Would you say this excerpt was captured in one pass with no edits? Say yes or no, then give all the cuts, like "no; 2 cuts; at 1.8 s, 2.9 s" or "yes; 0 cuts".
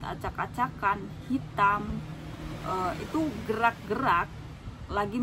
yes; 0 cuts